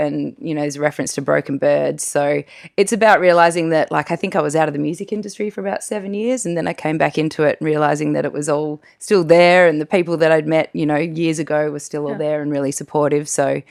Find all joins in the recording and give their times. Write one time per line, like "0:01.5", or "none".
none